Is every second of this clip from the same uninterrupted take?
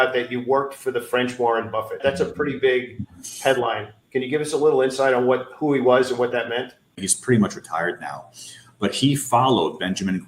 no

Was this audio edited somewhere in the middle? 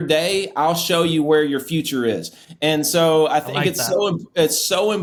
no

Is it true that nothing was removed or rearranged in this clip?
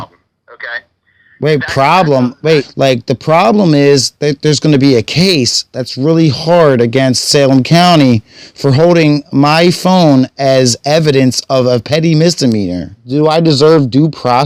no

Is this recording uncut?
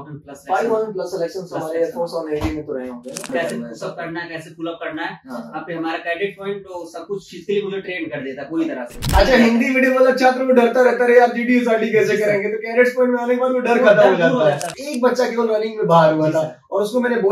no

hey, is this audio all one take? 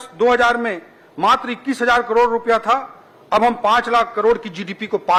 yes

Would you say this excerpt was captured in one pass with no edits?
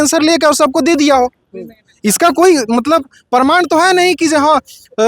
yes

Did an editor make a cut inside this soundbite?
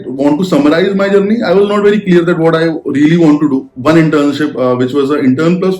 yes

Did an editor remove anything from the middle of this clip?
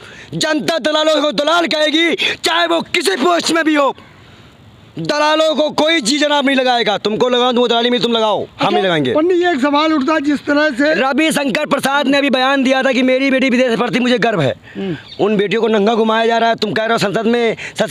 no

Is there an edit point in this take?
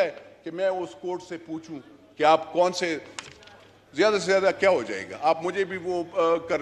no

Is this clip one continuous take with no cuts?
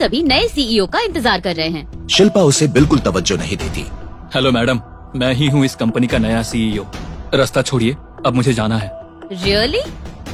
yes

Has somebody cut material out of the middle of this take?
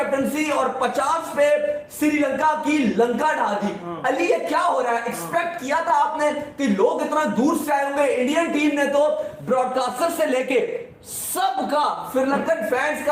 no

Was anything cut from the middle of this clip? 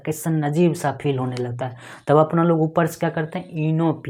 no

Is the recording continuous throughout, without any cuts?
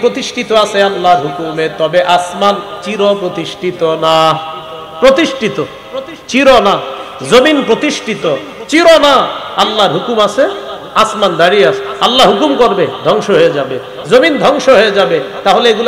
yes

